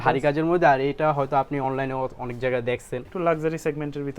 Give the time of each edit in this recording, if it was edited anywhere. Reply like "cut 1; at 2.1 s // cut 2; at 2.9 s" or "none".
cut 1; at 3.1 s

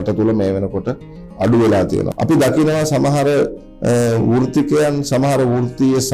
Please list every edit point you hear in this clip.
cut 1; at 2.1 s

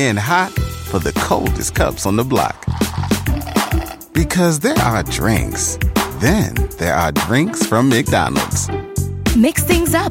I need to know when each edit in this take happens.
none

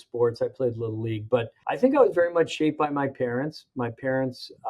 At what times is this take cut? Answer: cut 1; at 1.6 s

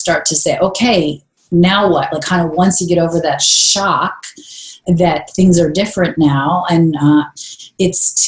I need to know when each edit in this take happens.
none

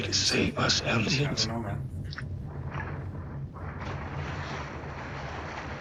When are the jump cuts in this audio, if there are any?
none

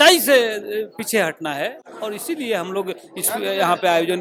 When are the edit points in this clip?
none

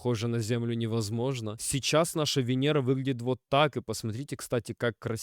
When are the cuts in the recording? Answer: cut 1; at 1.6 s

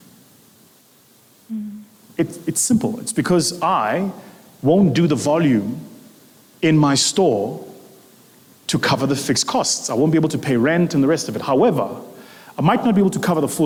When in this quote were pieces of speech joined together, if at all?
none

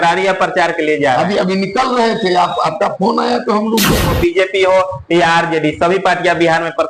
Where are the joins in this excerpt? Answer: cut 1; at 4.1 s

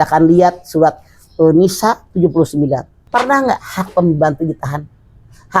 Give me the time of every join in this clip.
cut 1; at 2.9 s

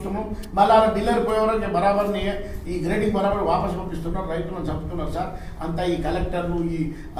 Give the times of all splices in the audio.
none

